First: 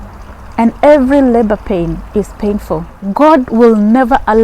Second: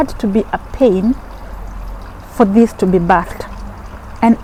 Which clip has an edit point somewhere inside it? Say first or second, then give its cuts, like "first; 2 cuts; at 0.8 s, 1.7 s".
first; 1 cut; at 3.0 s